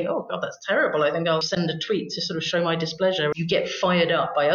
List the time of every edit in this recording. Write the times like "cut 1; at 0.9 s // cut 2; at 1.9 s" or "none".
cut 1; at 1.5 s // cut 2; at 3.3 s